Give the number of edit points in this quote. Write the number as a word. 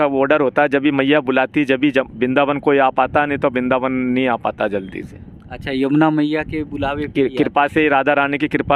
zero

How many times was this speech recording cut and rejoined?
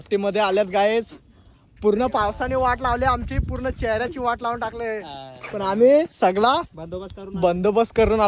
zero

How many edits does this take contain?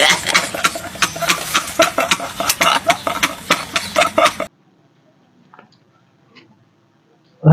one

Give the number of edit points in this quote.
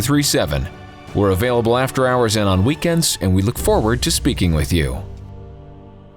one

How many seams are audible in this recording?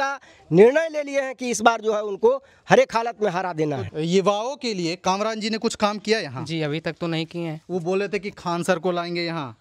two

